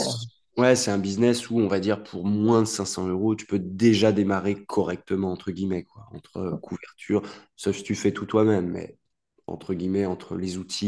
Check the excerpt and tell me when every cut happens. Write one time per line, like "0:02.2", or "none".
none